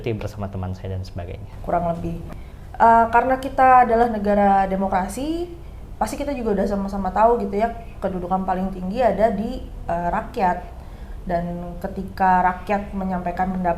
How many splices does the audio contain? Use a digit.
1